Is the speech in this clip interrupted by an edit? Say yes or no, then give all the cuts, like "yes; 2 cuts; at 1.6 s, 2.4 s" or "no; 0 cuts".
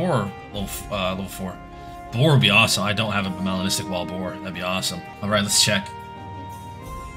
yes; 1 cut; at 5.2 s